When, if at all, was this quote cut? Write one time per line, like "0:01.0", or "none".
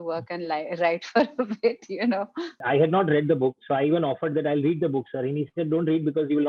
0:02.5